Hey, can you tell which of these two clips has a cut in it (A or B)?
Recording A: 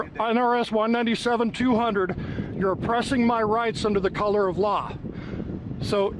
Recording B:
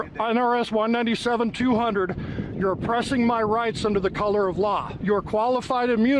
B